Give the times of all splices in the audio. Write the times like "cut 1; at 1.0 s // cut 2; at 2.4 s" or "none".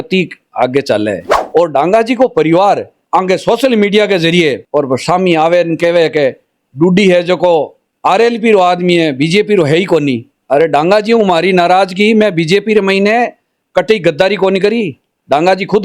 cut 1; at 1.3 s